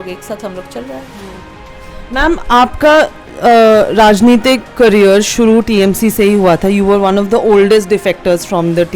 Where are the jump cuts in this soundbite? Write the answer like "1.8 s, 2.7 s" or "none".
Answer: 1.4 s